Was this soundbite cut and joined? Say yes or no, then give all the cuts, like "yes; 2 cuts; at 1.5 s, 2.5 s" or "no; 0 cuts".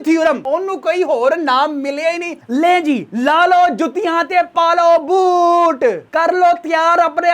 yes; 1 cut; at 2.3 s